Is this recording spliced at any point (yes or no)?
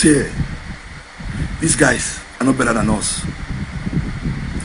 no